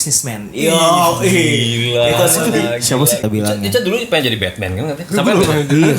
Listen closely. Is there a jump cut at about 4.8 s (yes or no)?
no